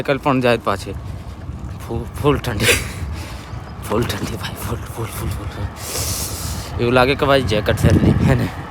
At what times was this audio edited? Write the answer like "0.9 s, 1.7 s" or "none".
none